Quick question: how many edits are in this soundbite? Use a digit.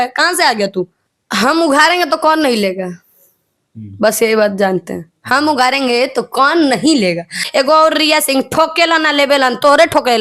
2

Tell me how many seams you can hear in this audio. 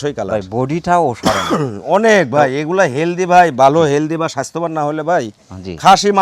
0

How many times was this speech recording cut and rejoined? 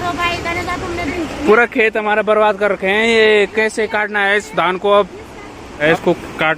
2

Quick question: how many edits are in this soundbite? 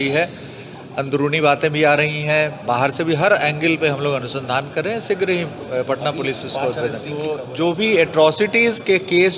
1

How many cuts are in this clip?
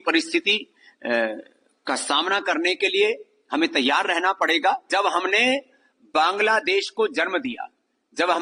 1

